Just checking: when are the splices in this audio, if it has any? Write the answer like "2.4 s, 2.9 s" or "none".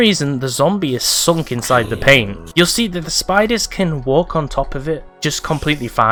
none